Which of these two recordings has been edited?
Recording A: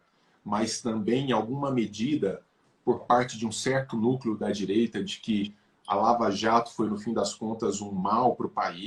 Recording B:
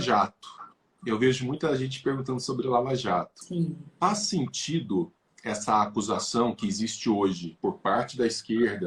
B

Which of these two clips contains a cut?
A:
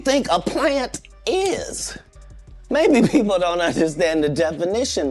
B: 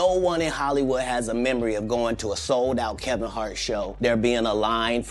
B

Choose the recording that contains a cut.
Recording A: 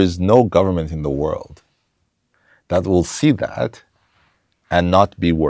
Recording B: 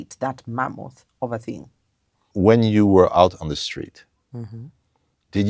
B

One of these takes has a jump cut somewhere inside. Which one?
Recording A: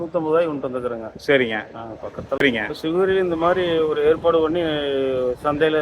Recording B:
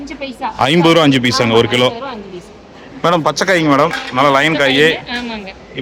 A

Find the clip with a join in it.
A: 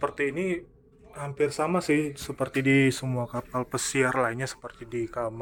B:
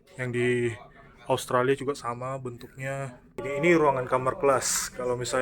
B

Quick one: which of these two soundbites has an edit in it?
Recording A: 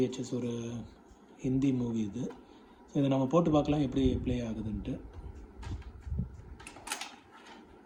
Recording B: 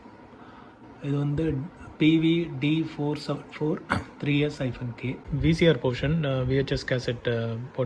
B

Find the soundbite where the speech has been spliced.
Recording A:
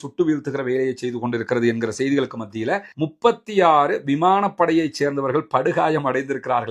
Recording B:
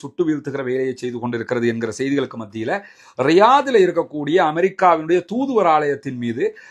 A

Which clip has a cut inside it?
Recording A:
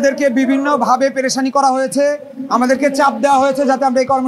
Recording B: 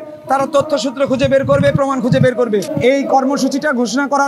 B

